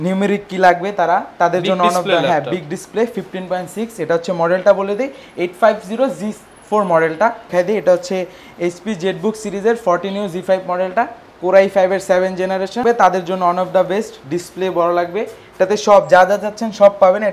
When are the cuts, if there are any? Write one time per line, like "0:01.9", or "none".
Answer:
0:07.5
0:12.8